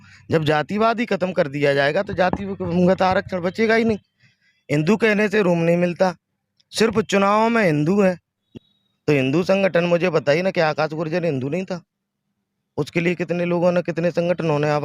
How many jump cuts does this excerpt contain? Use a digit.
1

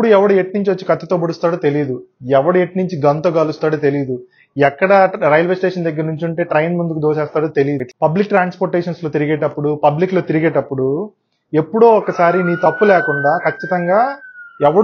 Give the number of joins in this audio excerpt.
1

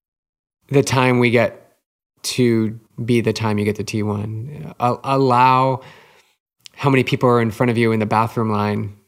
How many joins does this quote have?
1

